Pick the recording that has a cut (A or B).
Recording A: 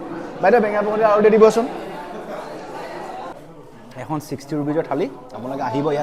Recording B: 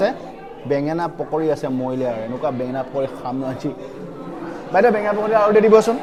A